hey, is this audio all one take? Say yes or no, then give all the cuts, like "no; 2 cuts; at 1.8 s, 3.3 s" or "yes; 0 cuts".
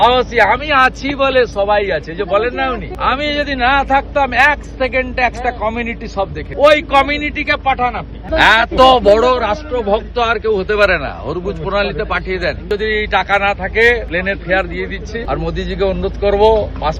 no; 6 cuts; at 2.9 s, 6.4 s, 8.2 s, 12.6 s, 14.1 s, 15.2 s